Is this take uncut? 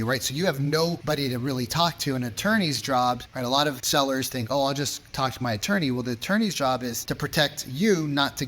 no; 3 cuts; at 1.0 s, 3.5 s, 7.0 s

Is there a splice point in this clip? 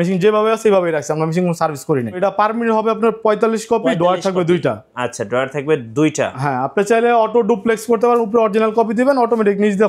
yes; 1 cut; at 2.2 s

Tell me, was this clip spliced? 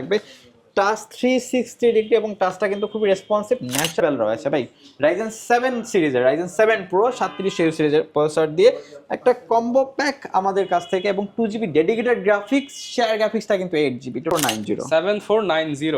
yes; 2 cuts; at 4.0 s, 14.3 s

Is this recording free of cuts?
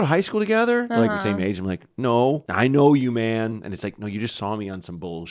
no; 1 cut; at 2.5 s

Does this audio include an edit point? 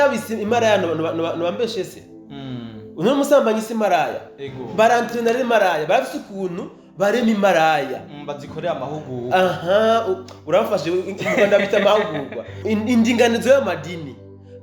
yes; 1 cut; at 12.6 s

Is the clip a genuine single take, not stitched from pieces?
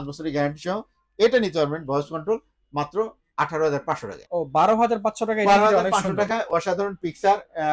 no; 1 cut; at 4.1 s

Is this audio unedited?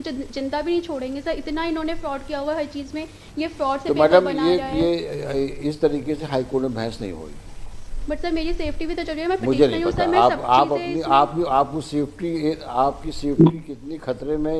yes; 0 cuts

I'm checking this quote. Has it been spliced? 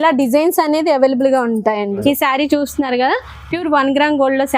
yes; 1 cut; at 2.0 s

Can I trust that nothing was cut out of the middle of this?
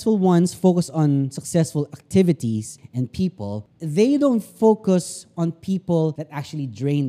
no; 3 cuts; at 2.8 s, 3.7 s, 6.2 s

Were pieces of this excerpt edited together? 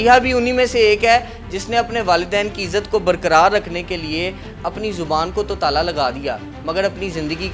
no; 0 cuts

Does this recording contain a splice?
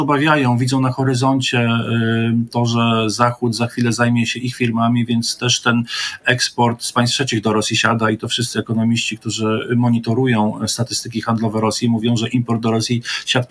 no; 0 cuts

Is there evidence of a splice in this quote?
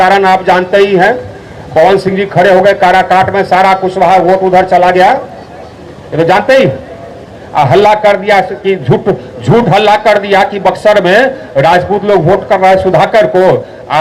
no; 0 cuts

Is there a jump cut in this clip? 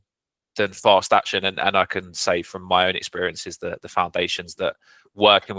no; 0 cuts

